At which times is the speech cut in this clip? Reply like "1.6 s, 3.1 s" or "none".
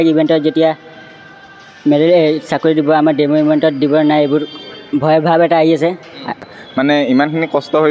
6.5 s